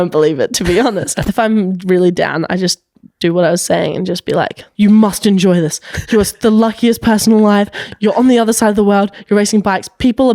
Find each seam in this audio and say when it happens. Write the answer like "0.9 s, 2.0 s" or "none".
1.1 s, 4.6 s